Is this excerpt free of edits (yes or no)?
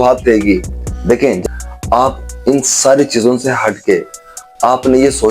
no